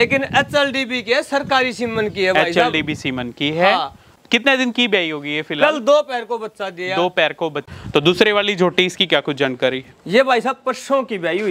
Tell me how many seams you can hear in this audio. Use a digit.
2